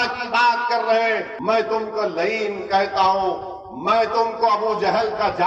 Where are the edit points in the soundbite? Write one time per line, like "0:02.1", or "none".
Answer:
0:01.3